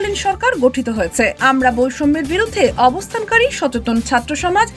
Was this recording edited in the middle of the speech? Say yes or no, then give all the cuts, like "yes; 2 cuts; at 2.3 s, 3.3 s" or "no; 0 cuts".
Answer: yes; 1 cut; at 1.4 s